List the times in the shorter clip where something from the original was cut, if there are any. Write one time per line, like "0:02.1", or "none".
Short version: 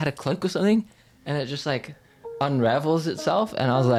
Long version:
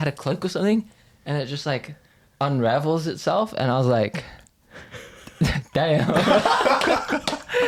none

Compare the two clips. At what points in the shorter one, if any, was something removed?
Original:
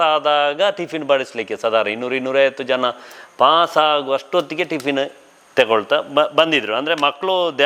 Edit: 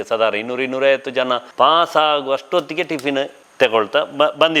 0:01.5
0:03.4

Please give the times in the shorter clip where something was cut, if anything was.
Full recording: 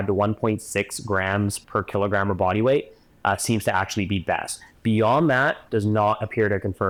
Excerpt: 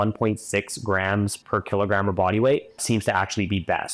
0:02.8

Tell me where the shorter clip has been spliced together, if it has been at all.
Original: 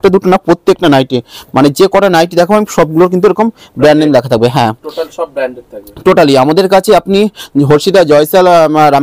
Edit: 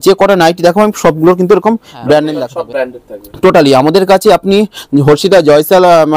0:02.4

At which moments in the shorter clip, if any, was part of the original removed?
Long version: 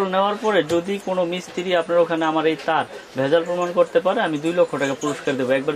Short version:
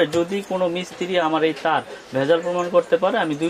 0:01.3

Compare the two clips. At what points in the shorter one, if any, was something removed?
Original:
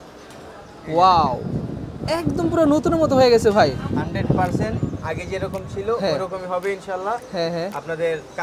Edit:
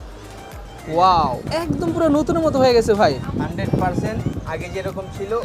0:01.4

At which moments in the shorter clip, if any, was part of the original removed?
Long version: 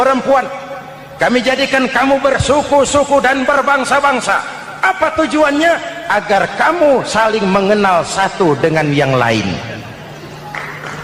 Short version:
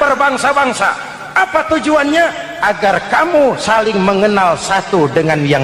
none

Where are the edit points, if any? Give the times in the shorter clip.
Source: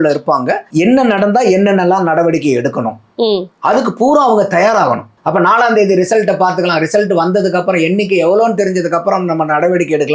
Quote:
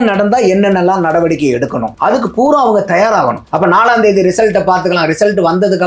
0:01.9
0:03.4

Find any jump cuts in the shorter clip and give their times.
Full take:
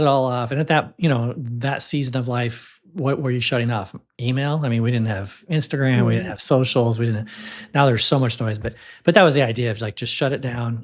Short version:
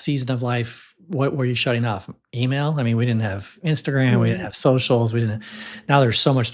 none

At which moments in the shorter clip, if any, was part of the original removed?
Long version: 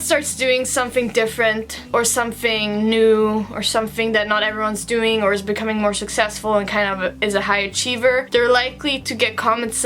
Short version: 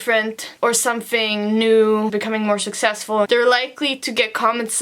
0:02.1
0:03.3

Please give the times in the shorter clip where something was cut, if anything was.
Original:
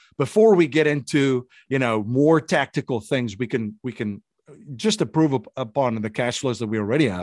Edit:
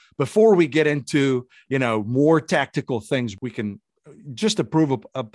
0:03.3

